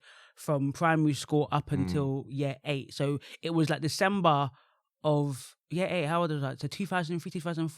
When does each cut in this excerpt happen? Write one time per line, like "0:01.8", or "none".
none